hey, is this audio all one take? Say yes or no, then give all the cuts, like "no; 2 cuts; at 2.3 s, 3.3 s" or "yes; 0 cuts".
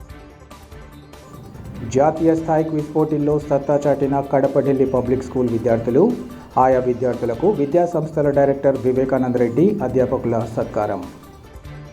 no; 1 cut; at 1.1 s